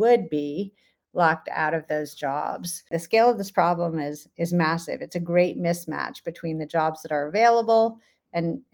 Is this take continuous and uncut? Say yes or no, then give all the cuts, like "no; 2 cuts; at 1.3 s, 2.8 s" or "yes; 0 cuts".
no; 1 cut; at 3.0 s